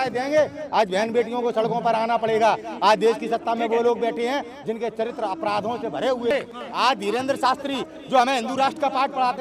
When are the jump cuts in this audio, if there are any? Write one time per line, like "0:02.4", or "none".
0:06.3